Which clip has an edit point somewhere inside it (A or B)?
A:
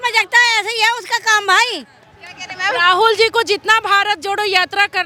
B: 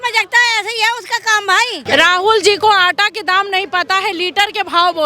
B